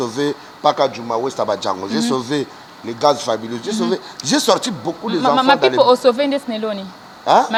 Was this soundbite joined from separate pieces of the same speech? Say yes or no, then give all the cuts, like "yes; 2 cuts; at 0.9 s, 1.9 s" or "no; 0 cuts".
no; 0 cuts